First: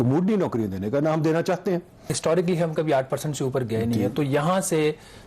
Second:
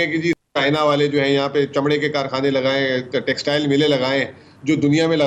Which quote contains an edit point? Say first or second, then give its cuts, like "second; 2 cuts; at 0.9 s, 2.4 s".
first; 1 cut; at 2.1 s